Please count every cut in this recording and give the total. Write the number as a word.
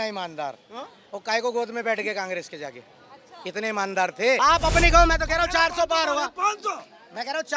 one